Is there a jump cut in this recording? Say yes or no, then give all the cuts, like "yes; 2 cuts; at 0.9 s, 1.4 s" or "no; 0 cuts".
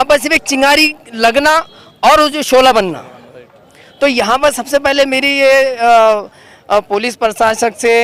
no; 0 cuts